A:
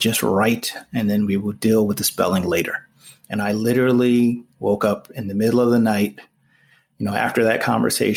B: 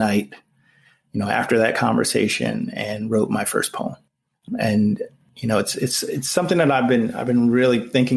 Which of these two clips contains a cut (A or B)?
B